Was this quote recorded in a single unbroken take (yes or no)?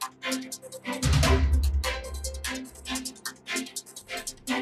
yes